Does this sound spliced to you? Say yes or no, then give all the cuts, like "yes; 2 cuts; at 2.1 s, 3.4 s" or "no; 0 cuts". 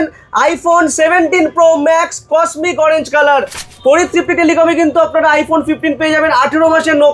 yes; 1 cut; at 3.6 s